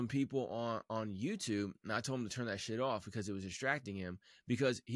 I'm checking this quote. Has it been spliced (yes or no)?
no